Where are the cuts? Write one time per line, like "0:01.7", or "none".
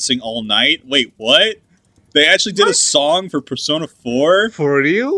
none